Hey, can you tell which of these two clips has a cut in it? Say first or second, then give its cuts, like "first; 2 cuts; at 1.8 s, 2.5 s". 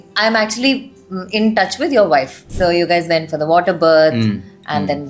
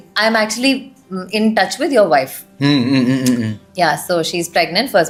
first; 1 cut; at 2.4 s